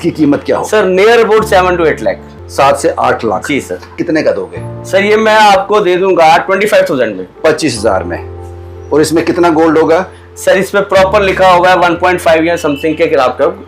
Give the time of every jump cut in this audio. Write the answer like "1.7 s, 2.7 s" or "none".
4.0 s